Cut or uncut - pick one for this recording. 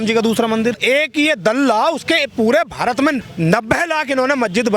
cut